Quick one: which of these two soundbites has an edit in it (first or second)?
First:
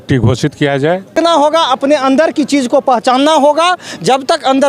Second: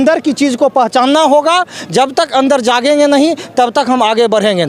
first